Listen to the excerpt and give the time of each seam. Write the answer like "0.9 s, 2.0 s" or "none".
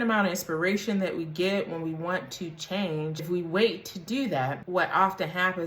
3.2 s, 4.6 s